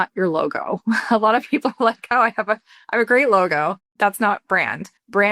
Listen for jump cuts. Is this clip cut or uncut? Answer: cut